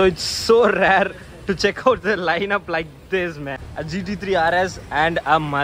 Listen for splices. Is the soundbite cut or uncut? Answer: cut